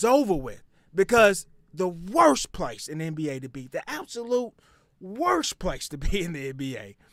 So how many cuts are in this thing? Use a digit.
0